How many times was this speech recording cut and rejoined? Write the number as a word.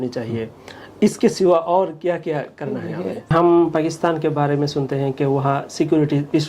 one